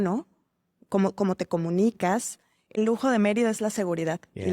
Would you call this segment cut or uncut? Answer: cut